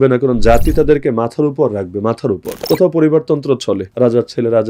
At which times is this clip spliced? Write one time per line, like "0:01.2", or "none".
0:02.5
0:03.9